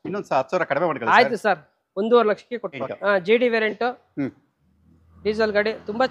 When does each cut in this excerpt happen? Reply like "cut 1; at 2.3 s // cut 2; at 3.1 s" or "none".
cut 1; at 2.8 s

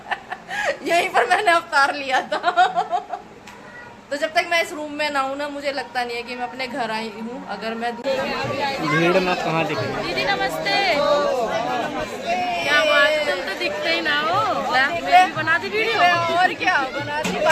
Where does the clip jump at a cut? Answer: cut 1; at 8.0 s

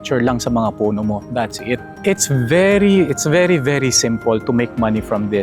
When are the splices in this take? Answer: cut 1; at 1.9 s

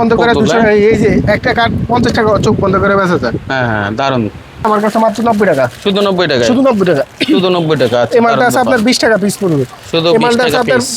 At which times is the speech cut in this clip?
cut 1; at 4.6 s

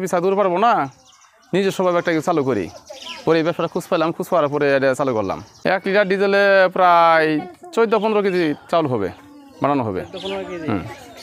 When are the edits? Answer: cut 1; at 5.5 s

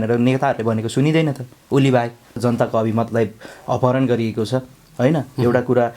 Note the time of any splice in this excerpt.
cut 1; at 2.4 s

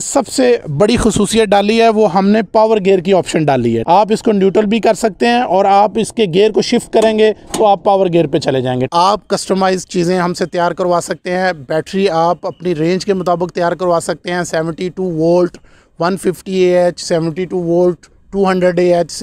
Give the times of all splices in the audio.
cut 1; at 8.9 s

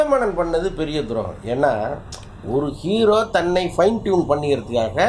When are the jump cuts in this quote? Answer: none

